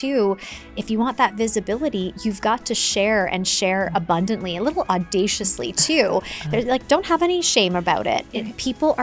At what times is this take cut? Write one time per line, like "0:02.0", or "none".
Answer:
none